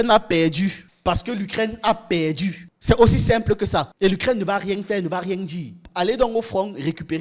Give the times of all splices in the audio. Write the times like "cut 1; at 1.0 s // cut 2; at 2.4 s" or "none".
cut 1; at 3.9 s // cut 2; at 5.9 s